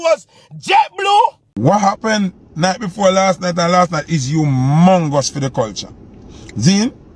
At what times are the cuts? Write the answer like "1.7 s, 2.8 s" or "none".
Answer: 1.5 s